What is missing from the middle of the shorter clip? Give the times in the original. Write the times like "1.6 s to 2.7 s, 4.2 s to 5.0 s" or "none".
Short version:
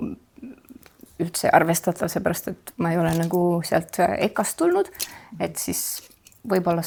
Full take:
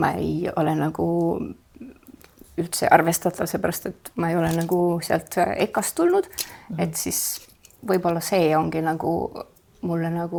none